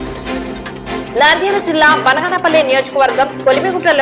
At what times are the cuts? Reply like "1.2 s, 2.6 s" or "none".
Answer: 1.1 s